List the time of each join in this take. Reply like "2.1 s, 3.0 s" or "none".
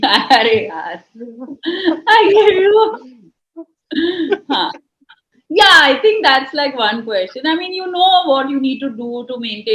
none